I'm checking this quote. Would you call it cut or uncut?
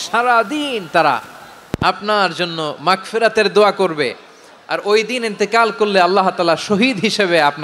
uncut